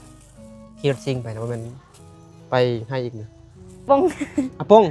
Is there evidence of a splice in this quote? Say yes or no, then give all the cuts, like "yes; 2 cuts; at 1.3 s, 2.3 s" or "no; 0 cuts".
yes; 1 cut; at 3.8 s